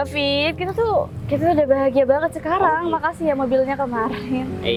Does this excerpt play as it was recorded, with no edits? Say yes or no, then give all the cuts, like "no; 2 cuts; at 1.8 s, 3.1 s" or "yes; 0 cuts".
yes; 0 cuts